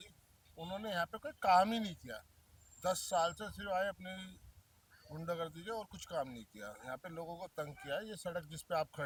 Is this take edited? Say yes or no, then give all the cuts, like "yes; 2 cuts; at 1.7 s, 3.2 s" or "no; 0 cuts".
no; 0 cuts